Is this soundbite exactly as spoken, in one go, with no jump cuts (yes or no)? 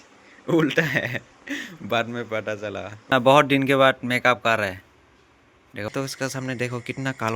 no